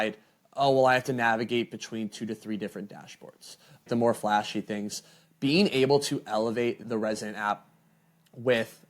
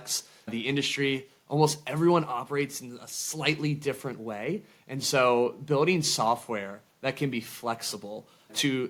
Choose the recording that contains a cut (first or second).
first